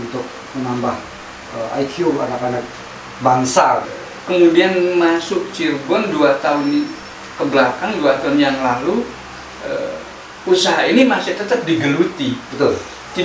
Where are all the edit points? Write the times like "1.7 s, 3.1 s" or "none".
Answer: 3.9 s